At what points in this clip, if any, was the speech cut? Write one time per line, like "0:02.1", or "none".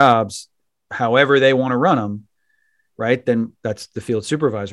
none